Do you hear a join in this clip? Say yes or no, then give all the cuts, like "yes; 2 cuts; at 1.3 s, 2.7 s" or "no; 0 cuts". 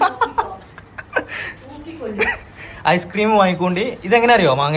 no; 0 cuts